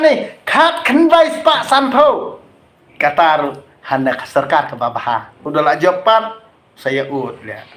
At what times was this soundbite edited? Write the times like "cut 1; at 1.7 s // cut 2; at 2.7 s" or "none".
cut 1; at 5.4 s